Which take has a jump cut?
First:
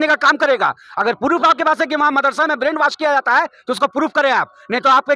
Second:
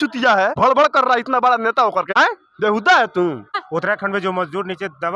second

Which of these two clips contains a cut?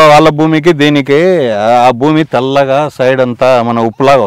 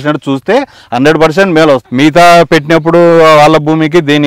second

